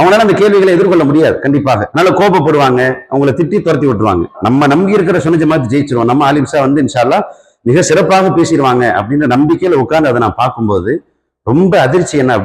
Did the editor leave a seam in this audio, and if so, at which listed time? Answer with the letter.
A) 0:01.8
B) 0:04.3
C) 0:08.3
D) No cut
B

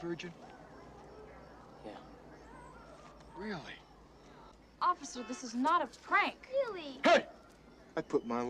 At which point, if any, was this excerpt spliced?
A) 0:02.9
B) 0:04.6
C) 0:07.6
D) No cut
B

